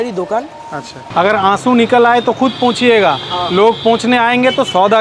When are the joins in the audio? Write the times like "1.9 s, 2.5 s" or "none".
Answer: 1.0 s

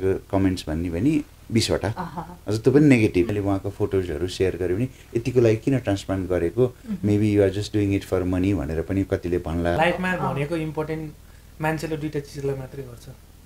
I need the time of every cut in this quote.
3.3 s, 9.8 s

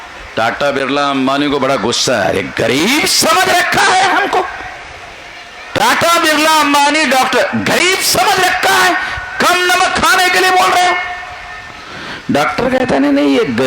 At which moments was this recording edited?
none

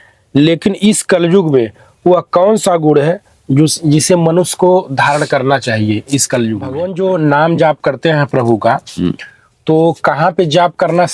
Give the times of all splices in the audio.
6.8 s

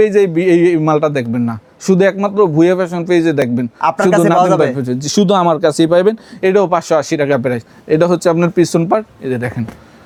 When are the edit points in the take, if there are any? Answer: none

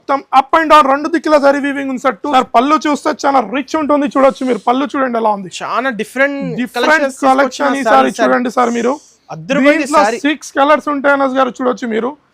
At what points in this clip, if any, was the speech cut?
2.2 s

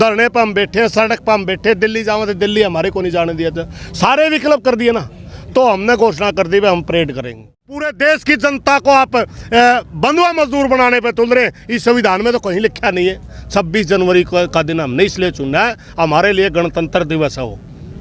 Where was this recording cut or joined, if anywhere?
7.9 s

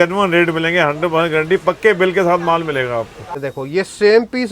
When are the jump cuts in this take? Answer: 3.2 s

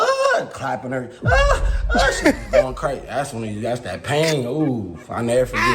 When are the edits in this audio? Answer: none

